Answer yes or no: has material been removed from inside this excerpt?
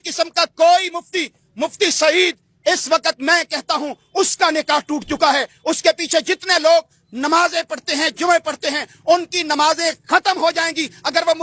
no